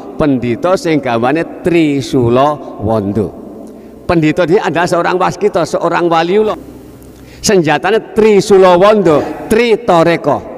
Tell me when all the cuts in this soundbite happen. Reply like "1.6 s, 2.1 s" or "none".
6.6 s, 9.3 s